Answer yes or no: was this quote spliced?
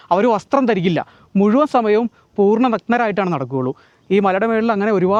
no